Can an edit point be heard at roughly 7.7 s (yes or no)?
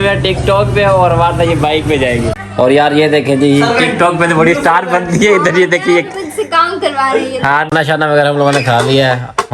yes